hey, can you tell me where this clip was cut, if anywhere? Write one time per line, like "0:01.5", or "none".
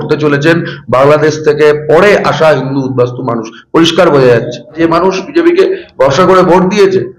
0:04.8